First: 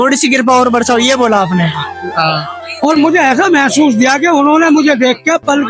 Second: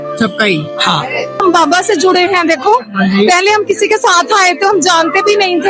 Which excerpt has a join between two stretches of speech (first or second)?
second